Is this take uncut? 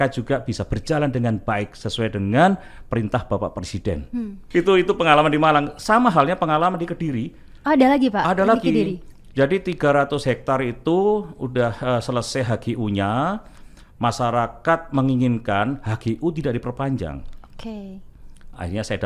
yes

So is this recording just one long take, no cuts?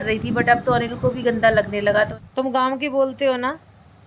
no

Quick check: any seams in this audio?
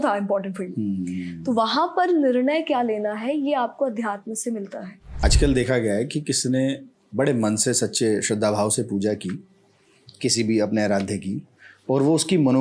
yes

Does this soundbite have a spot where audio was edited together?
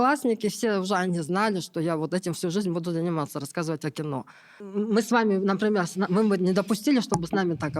yes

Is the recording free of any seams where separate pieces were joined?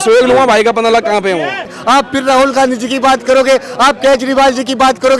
no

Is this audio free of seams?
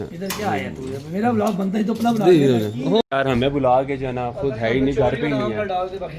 no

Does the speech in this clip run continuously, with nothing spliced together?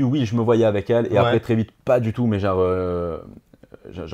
yes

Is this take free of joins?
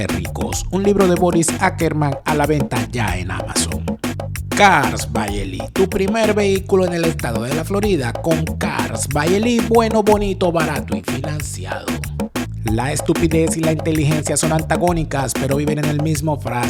yes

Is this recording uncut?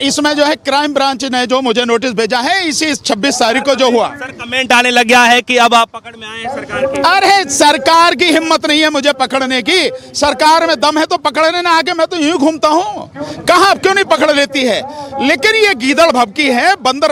yes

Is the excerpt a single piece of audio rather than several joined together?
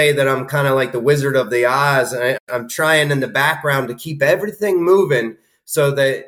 no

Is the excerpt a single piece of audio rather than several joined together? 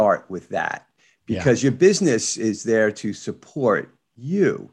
yes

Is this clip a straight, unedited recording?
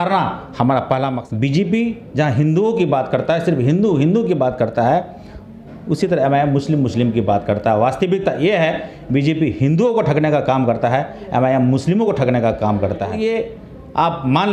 no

